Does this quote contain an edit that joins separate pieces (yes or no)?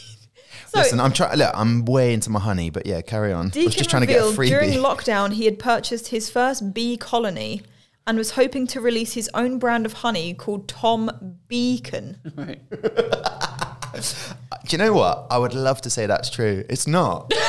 no